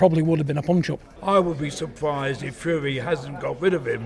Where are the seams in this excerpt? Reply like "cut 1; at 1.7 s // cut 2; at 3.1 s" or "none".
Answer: cut 1; at 1.1 s